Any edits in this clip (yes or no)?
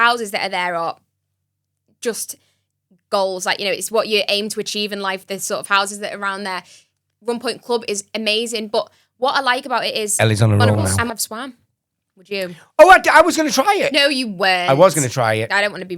yes